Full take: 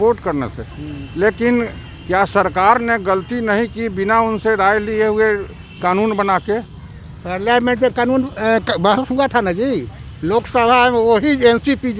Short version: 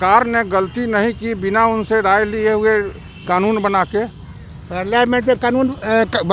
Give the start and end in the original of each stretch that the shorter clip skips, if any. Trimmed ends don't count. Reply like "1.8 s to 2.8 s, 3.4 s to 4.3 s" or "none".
none